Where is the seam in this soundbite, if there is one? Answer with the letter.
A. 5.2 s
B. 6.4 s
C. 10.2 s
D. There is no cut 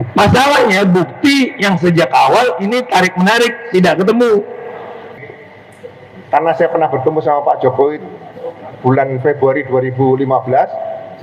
A